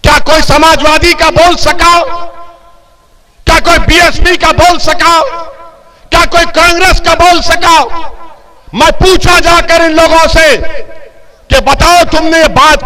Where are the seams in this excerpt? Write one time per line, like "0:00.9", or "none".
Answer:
none